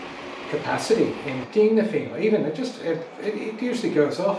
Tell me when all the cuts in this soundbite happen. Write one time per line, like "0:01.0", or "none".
0:01.4

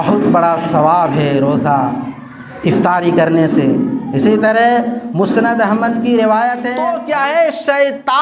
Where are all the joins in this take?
0:06.7

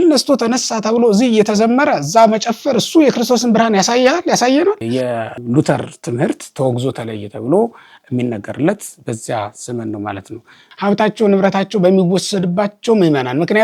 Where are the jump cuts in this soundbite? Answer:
0:04.9
0:10.7

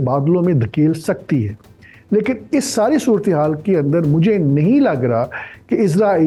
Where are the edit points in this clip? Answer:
none

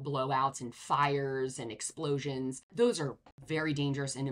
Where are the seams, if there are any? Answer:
0:02.6
0:03.4

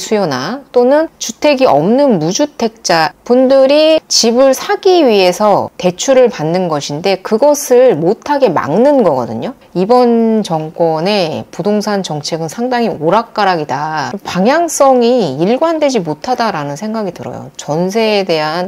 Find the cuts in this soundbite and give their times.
0:03.2
0:09.6

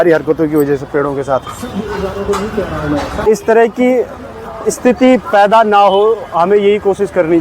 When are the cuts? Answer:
0:03.1

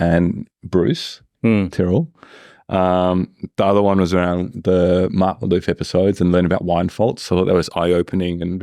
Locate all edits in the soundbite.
none

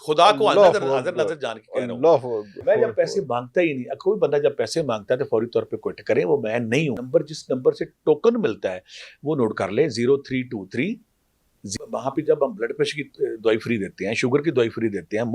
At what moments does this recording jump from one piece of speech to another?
0:02.6
0:07.0
0:11.7

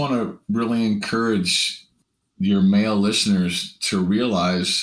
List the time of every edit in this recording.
none

